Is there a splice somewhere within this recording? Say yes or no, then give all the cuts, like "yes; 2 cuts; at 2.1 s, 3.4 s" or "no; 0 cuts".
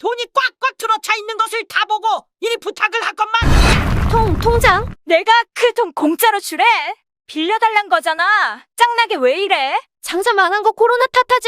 yes; 3 cuts; at 3.4 s, 4.9 s, 10.0 s